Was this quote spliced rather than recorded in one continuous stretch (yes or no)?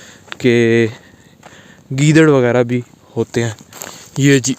yes